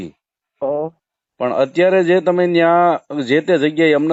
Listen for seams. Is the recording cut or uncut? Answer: uncut